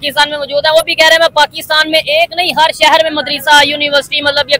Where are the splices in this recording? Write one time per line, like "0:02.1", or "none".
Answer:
none